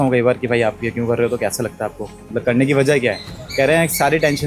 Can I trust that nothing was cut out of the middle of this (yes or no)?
yes